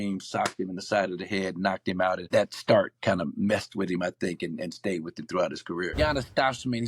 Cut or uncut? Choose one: cut